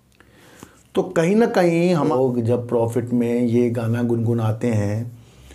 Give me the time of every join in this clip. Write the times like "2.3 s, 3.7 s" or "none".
2.0 s